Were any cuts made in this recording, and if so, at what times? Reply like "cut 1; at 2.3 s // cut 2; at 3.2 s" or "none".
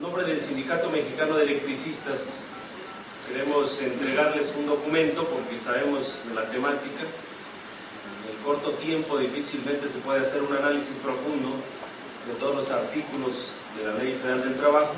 none